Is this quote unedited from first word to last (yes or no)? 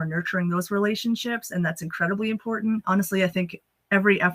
no